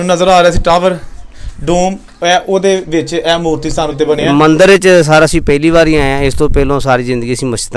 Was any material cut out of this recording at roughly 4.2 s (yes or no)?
yes